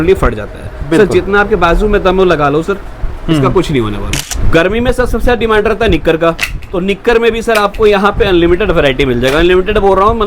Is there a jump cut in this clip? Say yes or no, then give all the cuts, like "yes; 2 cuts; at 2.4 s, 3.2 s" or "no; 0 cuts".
yes; 1 cut; at 4.2 s